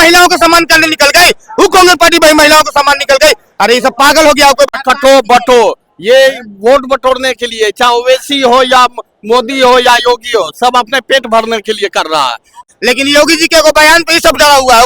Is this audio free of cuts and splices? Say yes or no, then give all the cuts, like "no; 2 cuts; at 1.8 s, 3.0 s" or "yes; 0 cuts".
no; 2 cuts; at 4.8 s, 12.6 s